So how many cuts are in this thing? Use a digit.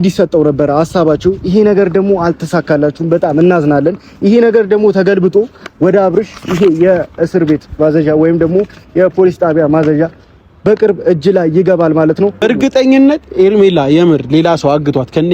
1